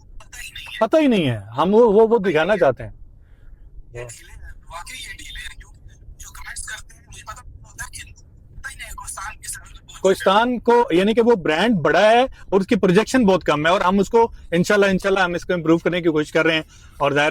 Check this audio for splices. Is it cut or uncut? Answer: uncut